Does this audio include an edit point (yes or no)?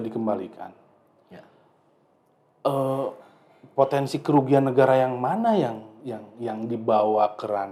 no